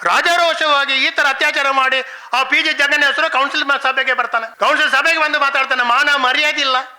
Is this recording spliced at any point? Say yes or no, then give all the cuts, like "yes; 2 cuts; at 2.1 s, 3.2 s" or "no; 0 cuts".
yes; 1 cut; at 4.5 s